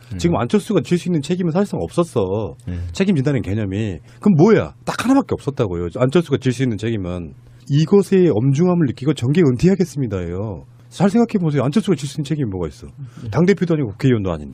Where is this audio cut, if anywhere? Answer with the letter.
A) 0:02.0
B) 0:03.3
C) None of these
C